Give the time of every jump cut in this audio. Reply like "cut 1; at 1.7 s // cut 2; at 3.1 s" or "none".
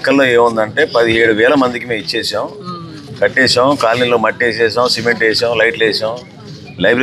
none